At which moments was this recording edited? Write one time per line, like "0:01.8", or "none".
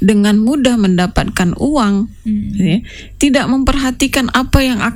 none